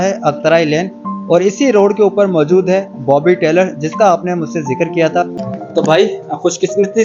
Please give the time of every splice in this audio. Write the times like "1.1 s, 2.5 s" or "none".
5.4 s